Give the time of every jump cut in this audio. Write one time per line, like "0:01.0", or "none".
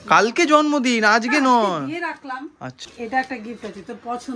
0:02.8